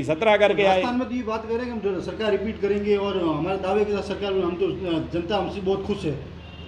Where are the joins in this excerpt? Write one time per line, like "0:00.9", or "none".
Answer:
none